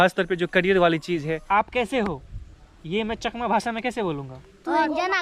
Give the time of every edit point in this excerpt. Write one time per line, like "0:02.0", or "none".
0:01.4